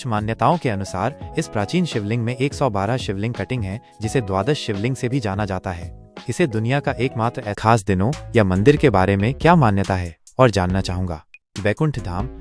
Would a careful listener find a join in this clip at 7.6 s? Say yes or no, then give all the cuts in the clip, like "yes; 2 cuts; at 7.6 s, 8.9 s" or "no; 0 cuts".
yes; 1 cut; at 7.6 s